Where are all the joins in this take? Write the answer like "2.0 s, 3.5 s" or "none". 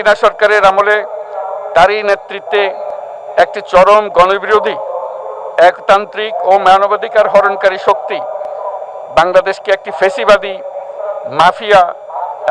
none